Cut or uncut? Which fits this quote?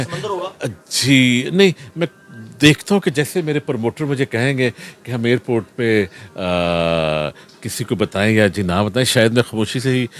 uncut